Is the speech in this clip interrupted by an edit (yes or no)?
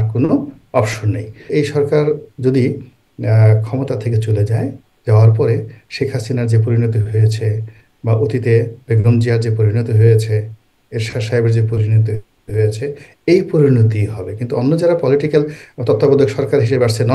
yes